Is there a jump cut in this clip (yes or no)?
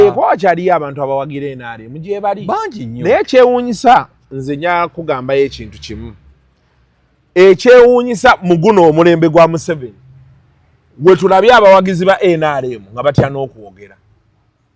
no